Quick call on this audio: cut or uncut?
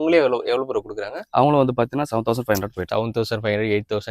cut